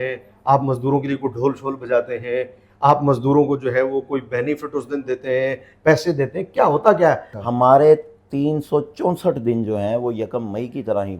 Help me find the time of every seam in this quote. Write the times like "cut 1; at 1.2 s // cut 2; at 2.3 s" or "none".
cut 1; at 7.3 s